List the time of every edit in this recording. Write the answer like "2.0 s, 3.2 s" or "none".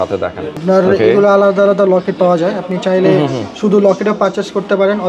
none

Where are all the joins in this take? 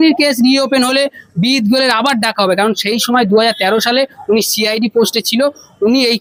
none

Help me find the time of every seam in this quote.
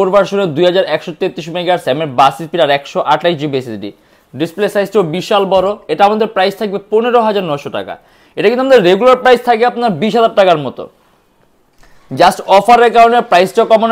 none

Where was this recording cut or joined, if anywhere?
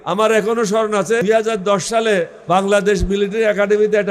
1.2 s, 2.4 s

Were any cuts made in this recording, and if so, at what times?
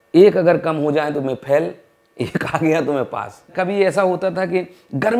3.4 s

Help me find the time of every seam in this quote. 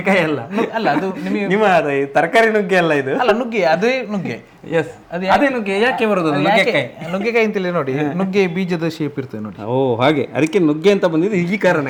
none

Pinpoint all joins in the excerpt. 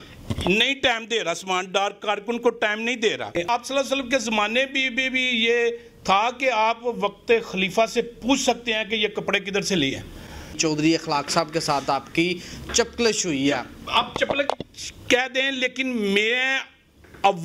3.5 s, 10.6 s

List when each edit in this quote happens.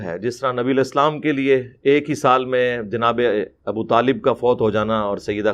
none

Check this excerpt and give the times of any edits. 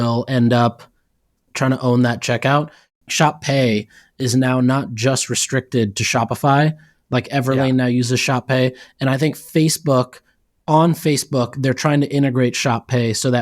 2.9 s

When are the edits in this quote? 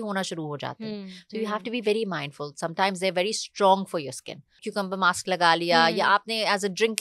4.7 s

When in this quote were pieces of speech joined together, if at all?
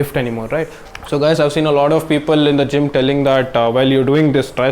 1.0 s

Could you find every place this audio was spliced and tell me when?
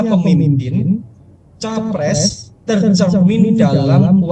none

